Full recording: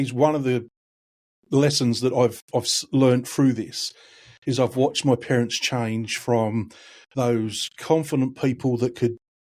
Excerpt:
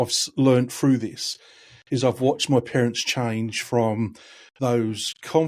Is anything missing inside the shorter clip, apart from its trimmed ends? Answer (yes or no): no